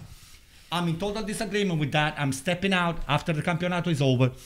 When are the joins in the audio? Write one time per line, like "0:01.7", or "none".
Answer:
none